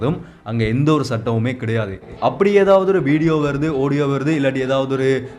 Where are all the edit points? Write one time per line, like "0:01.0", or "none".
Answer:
0:02.1